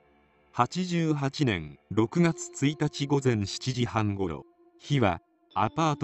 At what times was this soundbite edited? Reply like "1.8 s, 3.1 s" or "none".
none